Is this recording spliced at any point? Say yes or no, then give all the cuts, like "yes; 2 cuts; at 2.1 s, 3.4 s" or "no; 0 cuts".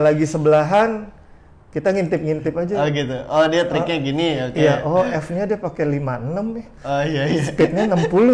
no; 0 cuts